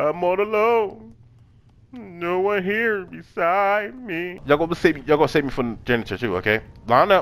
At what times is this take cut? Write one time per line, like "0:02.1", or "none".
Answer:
0:04.4